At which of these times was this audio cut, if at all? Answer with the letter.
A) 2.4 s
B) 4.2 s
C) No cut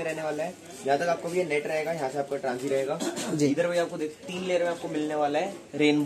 C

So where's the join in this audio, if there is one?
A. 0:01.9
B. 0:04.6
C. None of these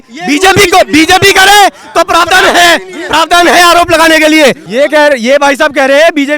C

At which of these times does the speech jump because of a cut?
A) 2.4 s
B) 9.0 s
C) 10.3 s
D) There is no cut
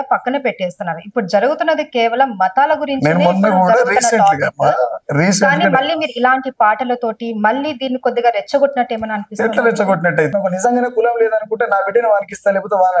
C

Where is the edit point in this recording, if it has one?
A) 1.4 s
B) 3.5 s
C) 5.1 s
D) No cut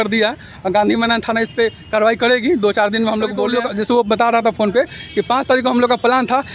B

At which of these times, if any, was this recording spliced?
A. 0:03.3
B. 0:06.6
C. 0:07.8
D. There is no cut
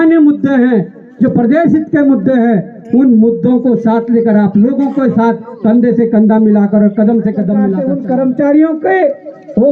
C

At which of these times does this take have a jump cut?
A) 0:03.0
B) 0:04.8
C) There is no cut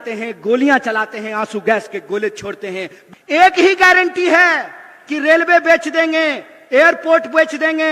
A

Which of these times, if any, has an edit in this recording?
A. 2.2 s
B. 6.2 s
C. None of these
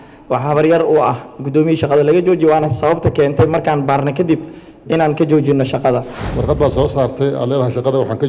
B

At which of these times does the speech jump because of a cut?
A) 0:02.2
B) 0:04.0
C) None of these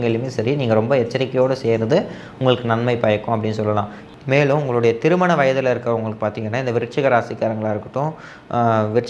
B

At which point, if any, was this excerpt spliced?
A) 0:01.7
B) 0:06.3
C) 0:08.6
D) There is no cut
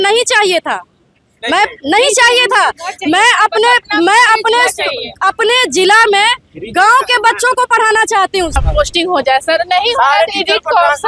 C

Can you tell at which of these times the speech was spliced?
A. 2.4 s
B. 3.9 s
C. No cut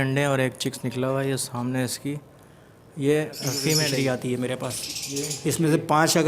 B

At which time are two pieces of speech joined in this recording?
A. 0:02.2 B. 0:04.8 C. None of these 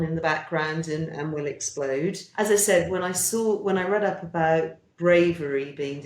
A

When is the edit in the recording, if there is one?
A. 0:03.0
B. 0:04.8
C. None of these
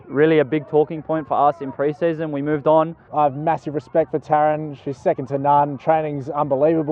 A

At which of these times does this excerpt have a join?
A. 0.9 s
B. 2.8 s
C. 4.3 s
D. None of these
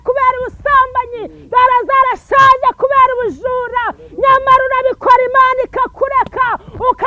D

